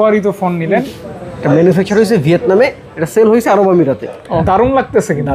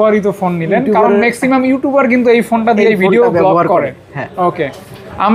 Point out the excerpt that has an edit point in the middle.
first; 2 cuts; at 0.8 s, 4.4 s

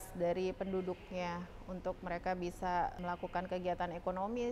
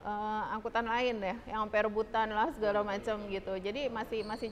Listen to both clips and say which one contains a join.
first; 1 cut; at 3.0 s

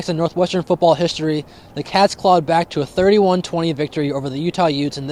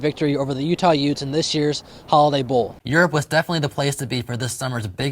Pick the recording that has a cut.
second; 1 cut; at 2.8 s

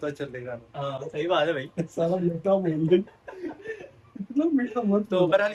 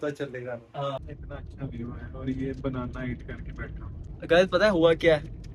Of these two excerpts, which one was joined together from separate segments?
second; 2 cuts; at 1.0 s, 4.1 s

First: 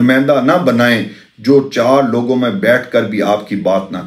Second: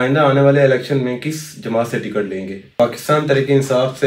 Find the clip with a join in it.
second; 1 cut; at 2.7 s

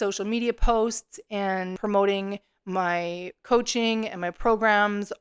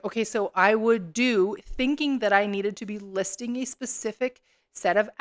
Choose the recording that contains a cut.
first; 1 cut; at 1.8 s

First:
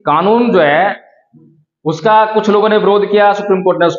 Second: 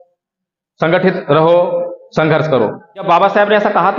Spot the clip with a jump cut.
second; 1 cut; at 3.0 s

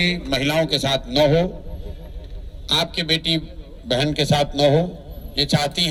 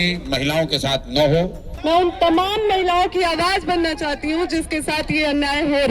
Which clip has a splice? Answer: second; 1 cut; at 1.7 s

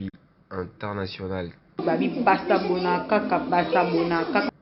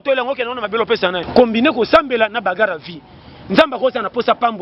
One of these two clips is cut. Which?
second; 1 cut; at 1.2 s

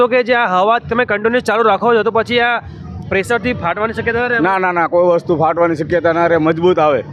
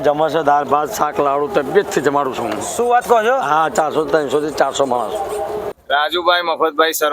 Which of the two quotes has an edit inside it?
second; 1 cut; at 5.7 s

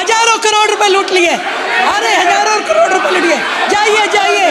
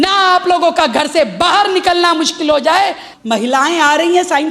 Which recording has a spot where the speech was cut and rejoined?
second; 1 cut; at 3.1 s

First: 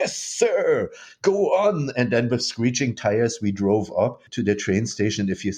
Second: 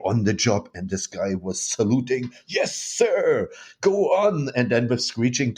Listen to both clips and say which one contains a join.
first; 1 cut; at 4.3 s

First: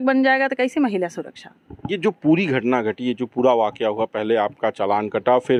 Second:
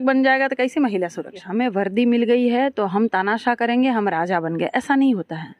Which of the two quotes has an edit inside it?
second; 1 cut; at 1.4 s

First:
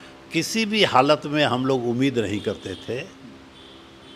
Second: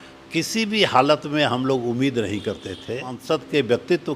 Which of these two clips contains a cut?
second; 1 cut; at 3.2 s

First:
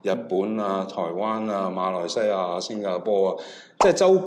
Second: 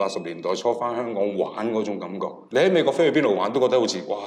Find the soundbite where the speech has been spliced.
second; 1 cut; at 2.4 s

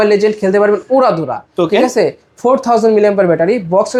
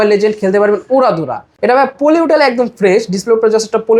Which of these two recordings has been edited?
second; 1 cut; at 1.5 s

